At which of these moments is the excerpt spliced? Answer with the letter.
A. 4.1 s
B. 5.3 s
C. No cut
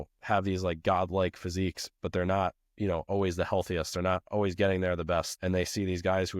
B